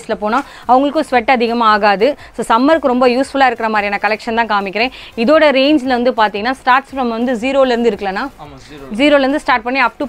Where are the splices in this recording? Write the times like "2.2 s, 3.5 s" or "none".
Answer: none